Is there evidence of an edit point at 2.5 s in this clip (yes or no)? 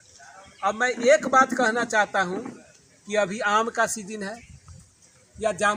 no